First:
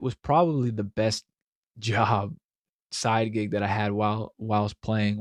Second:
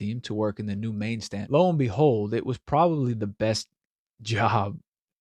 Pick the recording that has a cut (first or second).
second